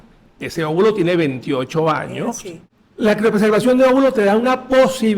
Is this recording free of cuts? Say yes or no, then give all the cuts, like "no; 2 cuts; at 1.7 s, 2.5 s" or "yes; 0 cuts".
no; 1 cut; at 2.5 s